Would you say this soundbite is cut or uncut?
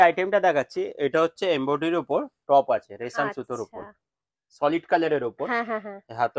uncut